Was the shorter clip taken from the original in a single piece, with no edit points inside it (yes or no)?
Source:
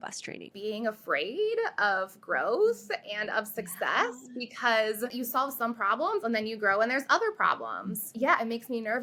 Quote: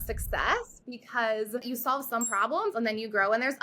yes